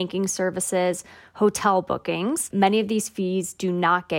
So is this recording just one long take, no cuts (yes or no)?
no